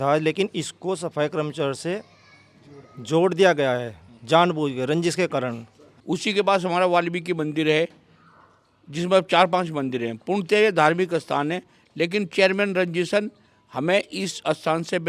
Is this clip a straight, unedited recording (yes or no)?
no